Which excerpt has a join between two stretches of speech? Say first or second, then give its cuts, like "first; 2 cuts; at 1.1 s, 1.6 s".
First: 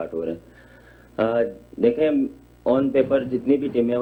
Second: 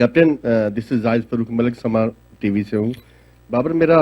second; 1 cut; at 1.8 s